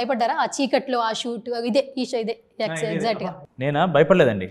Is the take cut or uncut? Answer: cut